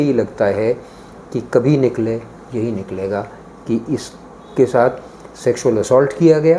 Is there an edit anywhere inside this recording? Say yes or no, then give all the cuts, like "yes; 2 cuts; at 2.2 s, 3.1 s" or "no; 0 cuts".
no; 0 cuts